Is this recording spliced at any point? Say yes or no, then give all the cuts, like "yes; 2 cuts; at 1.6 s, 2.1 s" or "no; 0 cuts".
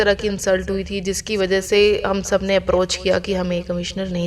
no; 0 cuts